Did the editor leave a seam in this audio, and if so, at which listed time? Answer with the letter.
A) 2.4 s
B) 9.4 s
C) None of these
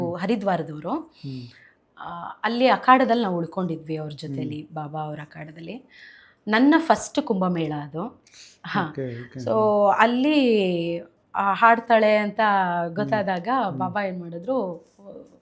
C